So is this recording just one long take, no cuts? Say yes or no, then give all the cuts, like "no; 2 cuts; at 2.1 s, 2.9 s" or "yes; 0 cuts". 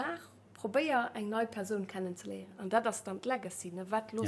no; 1 cut; at 2.5 s